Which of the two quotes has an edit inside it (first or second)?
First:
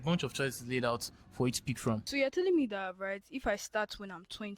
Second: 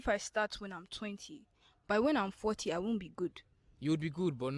first